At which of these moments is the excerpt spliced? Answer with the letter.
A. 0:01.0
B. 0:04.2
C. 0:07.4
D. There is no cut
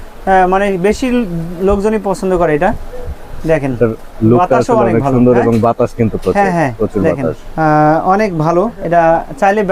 C